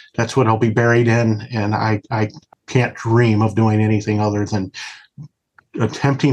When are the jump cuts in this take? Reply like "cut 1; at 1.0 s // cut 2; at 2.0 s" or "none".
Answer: cut 1; at 2.4 s